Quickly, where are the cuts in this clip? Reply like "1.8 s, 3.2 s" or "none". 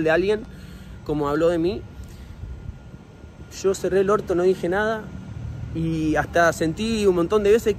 none

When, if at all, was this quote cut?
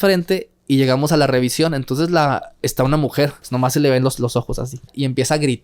3.5 s, 4.9 s

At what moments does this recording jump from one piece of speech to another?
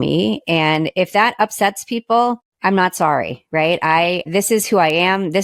2.5 s, 4.3 s

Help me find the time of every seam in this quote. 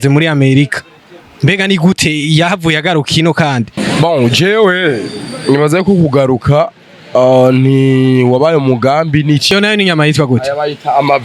3.8 s, 9.5 s

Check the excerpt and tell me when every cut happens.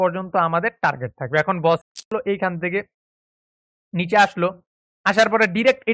1.9 s

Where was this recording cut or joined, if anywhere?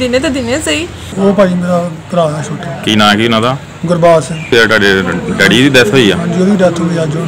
1.0 s, 4.5 s

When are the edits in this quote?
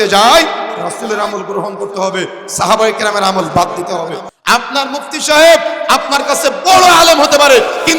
4.3 s

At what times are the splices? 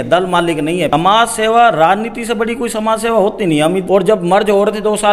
0.9 s, 3.8 s

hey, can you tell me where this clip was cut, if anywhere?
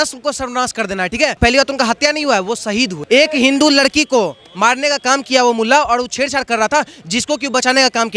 1.4 s, 3.0 s

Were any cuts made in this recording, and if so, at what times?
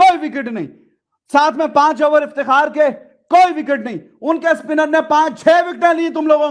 none

